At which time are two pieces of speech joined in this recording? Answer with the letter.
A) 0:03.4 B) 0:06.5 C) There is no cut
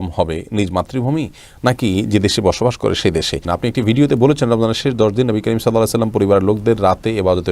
A